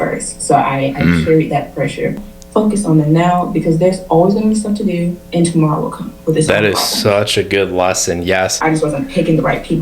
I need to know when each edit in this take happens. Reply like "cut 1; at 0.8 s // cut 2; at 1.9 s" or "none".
cut 1; at 2.2 s // cut 2; at 8.5 s